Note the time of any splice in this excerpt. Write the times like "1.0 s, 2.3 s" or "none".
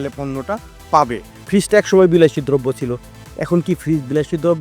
1.3 s